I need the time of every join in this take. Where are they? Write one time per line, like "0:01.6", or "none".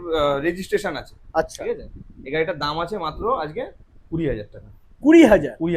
none